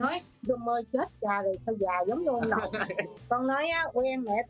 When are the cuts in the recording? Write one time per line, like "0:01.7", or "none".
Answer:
0:03.1